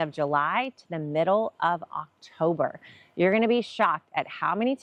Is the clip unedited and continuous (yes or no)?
yes